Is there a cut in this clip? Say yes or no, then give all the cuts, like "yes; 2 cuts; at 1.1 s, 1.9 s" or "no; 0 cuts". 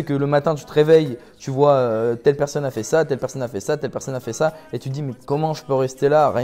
no; 0 cuts